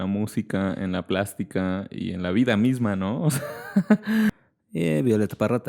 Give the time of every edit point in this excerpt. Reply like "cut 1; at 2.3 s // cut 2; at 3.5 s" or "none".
cut 1; at 4.3 s